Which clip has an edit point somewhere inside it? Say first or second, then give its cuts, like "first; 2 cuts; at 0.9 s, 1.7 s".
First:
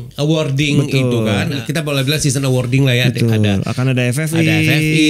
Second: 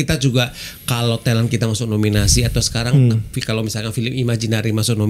first; 1 cut; at 1.6 s